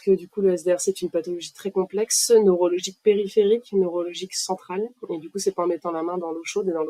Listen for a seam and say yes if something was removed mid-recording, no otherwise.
no